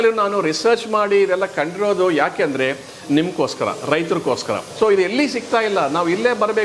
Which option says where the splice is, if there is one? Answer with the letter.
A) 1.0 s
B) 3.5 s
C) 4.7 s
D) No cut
C